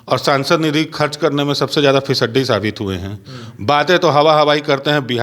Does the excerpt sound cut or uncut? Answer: uncut